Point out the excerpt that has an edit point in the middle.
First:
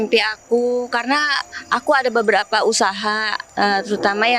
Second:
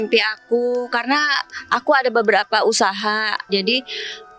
second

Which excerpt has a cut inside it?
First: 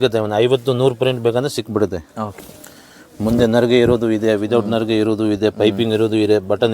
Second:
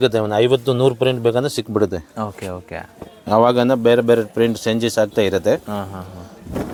first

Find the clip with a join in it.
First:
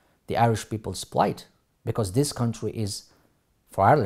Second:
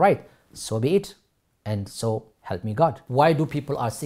second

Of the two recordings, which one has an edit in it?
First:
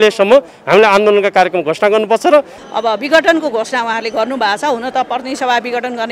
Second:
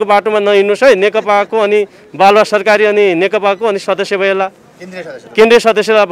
first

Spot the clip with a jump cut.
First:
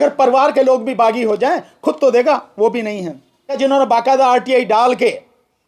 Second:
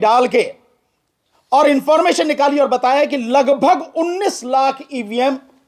first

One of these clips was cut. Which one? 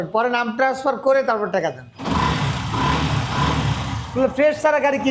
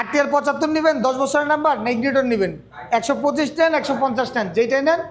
first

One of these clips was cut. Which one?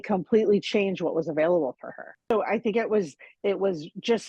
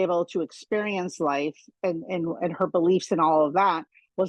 first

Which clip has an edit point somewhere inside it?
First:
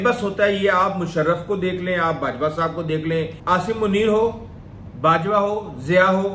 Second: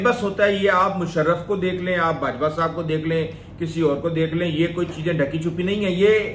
first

